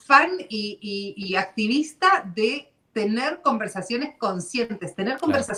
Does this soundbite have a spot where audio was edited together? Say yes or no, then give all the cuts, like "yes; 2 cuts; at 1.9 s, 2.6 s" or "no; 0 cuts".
no; 0 cuts